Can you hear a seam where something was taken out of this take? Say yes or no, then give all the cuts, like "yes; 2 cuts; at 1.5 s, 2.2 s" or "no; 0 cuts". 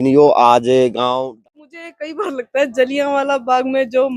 yes; 1 cut; at 1.3 s